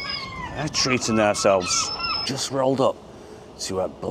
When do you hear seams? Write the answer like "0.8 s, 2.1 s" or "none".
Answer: 2.2 s